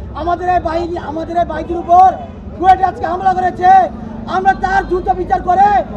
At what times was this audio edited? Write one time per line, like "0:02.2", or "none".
none